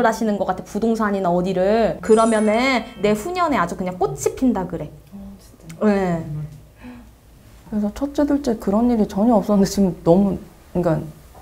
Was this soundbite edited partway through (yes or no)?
yes